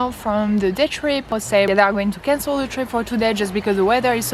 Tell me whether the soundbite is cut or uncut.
cut